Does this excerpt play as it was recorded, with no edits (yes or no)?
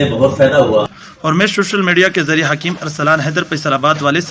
no